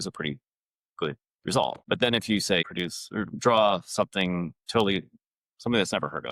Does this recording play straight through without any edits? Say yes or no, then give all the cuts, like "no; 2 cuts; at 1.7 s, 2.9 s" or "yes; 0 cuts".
no; 2 cuts; at 1.8 s, 2.7 s